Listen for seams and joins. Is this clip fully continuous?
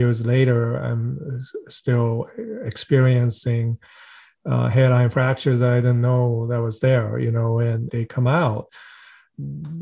no; 1 cut; at 8.7 s

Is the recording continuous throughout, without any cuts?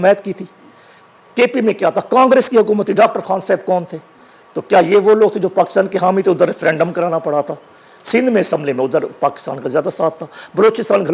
yes; 0 cuts

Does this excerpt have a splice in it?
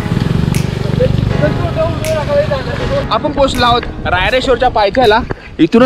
yes; 1 cut; at 3.1 s

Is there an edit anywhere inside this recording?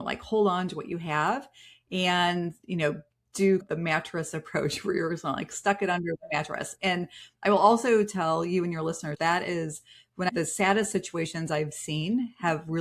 yes; 1 cut; at 10.3 s

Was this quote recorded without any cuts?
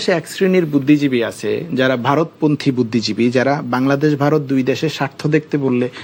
yes; 0 cuts

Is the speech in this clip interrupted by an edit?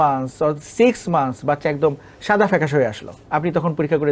yes; 1 cut; at 3.1 s

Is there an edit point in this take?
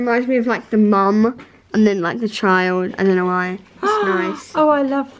no; 0 cuts

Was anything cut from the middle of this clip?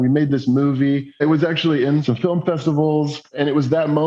yes; 2 cuts; at 1.2 s, 2.0 s

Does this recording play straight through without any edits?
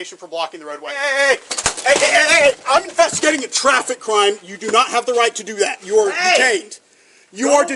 no; 1 cut; at 1.1 s

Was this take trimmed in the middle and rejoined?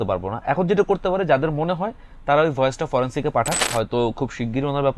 yes; 1 cut; at 3.6 s

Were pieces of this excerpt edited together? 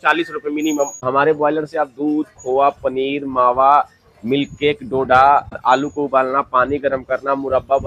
yes; 2 cuts; at 1.0 s, 5.6 s

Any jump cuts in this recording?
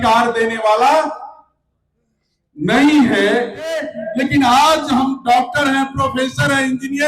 yes; 1 cut; at 4.0 s

